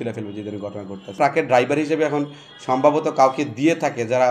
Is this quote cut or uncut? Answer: cut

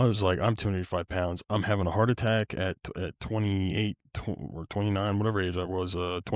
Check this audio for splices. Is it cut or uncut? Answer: uncut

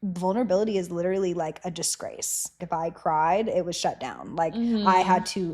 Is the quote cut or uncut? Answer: cut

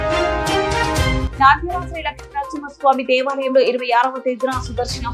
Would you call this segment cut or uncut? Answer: cut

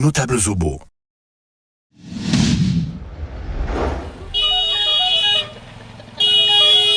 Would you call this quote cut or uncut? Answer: uncut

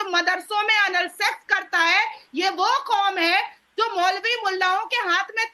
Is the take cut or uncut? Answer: uncut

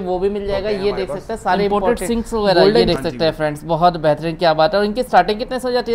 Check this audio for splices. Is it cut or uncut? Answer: cut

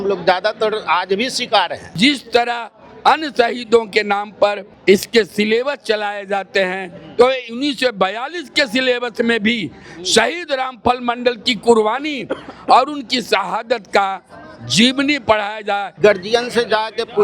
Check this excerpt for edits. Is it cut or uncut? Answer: cut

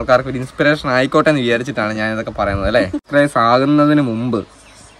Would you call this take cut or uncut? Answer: cut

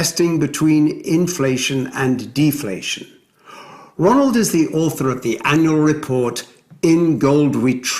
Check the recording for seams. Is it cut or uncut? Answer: uncut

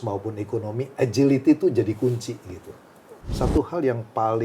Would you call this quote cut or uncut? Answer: cut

